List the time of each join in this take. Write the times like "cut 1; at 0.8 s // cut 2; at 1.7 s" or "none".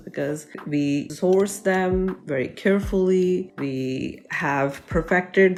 none